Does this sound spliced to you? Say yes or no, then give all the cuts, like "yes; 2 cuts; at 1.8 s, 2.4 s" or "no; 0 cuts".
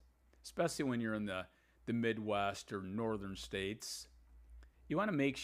no; 0 cuts